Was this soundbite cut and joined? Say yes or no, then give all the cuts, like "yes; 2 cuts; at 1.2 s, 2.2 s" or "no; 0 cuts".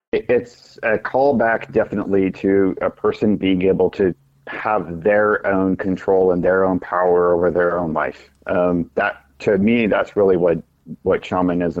no; 0 cuts